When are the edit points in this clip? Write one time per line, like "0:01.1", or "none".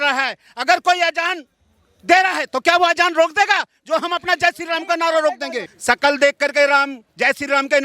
0:05.7